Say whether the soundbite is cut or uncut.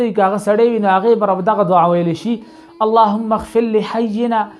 uncut